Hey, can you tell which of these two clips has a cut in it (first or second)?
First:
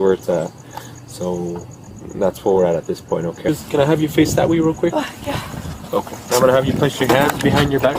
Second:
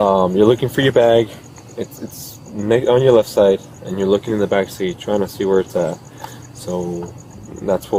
first